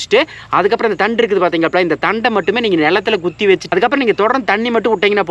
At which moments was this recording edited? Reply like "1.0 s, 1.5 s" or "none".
none